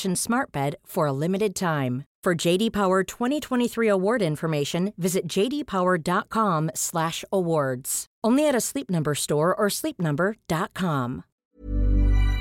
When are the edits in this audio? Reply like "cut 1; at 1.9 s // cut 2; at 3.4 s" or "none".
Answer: cut 1; at 11.3 s